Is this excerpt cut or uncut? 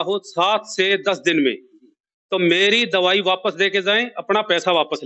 uncut